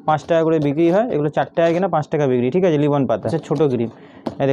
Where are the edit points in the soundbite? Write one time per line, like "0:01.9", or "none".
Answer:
0:03.4